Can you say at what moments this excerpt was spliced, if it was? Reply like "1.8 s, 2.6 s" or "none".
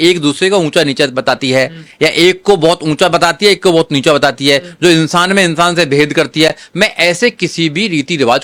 none